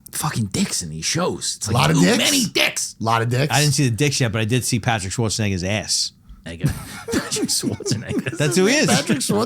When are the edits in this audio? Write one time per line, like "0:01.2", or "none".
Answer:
0:06.5